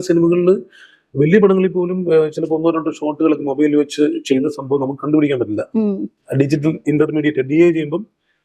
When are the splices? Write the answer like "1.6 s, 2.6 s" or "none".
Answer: none